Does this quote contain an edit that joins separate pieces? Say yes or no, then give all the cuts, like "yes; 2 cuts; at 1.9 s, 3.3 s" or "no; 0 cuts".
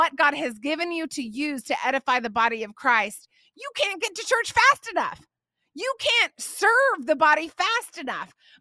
no; 0 cuts